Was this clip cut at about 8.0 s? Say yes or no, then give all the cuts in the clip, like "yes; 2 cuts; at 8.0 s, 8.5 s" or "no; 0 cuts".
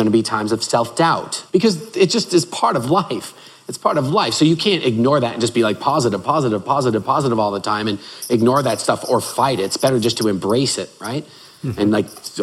no; 1 cut; at 1.4 s